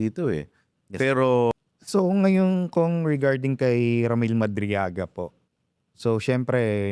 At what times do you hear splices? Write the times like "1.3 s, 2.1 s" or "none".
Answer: 1.5 s